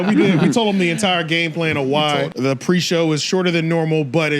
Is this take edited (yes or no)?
yes